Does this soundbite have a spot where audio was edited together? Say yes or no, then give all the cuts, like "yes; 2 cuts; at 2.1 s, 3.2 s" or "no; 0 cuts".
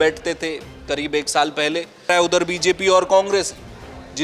yes; 1 cut; at 2.1 s